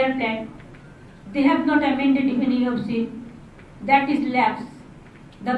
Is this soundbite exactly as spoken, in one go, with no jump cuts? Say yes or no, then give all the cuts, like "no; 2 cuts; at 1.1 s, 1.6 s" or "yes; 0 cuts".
yes; 0 cuts